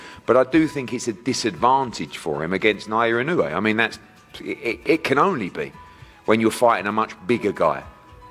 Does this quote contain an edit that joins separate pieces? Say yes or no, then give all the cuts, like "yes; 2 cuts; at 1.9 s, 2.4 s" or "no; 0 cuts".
no; 0 cuts